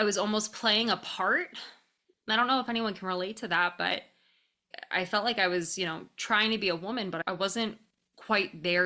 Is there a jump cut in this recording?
no; 0 cuts

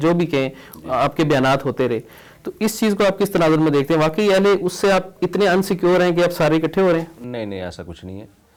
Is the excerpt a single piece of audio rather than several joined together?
yes; 0 cuts

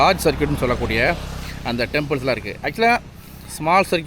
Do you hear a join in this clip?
no; 0 cuts

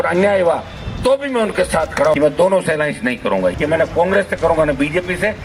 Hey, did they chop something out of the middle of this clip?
yes; 2 cuts; at 2.2 s, 3.5 s

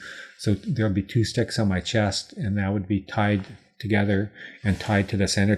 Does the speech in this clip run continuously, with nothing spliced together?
yes; 0 cuts

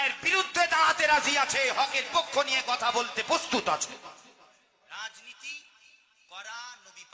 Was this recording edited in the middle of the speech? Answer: yes; 1 cut; at 4.2 s

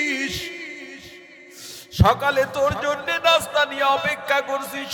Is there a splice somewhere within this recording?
no; 0 cuts

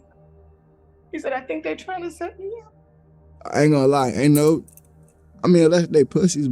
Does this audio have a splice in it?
yes; 1 cut; at 2.8 s

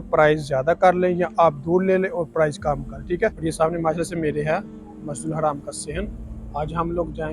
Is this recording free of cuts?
no; 1 cut; at 3.4 s

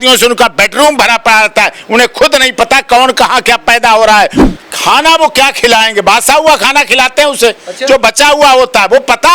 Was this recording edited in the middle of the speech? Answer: yes; 1 cut; at 4.4 s

